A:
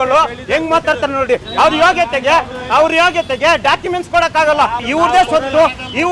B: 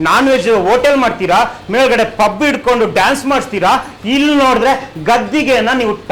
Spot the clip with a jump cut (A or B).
A